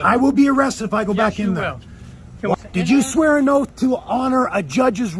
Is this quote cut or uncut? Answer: cut